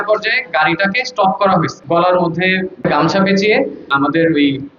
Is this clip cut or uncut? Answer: cut